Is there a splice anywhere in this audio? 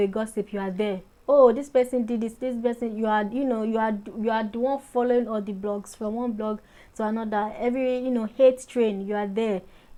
no; 0 cuts

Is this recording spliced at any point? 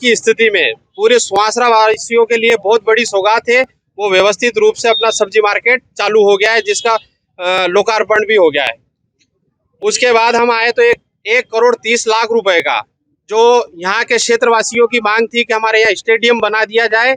no; 0 cuts

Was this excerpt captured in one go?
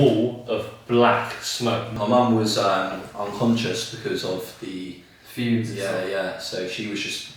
no; 1 cut; at 2.0 s

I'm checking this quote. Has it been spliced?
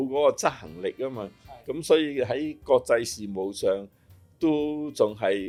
no; 0 cuts

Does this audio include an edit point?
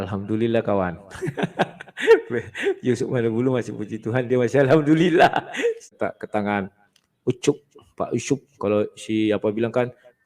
yes; 1 cut; at 6.0 s

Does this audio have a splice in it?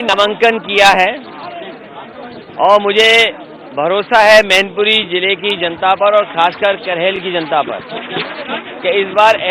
no; 0 cuts

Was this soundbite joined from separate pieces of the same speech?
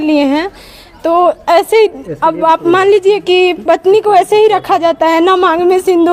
no; 0 cuts

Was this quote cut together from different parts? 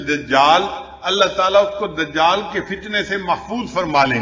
no; 0 cuts

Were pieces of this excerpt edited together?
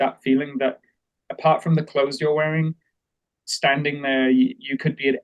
no; 0 cuts

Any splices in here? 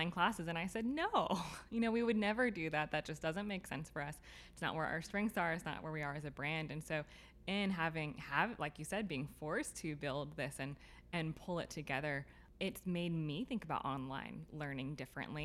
yes; 1 cut; at 12.4 s

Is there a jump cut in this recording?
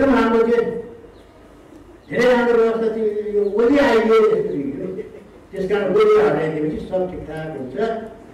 no; 0 cuts

